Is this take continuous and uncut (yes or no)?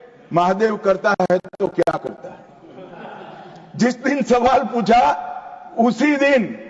yes